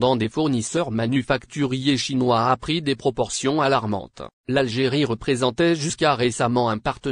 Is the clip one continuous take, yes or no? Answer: no